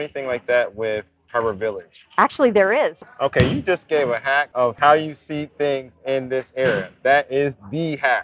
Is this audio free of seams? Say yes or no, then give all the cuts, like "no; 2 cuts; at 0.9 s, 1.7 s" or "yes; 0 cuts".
no; 3 cuts; at 1.2 s, 3.0 s, 4.7 s